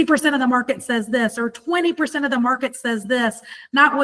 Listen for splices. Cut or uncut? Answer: uncut